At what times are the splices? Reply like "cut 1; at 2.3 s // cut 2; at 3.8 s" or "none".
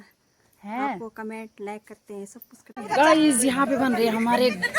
cut 1; at 2.7 s